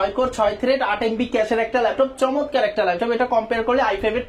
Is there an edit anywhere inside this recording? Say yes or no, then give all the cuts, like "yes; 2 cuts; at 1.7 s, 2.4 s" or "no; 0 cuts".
no; 0 cuts